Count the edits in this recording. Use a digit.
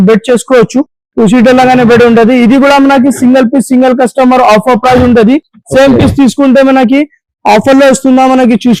0